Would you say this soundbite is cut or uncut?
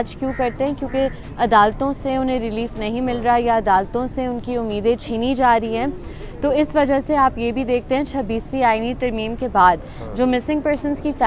uncut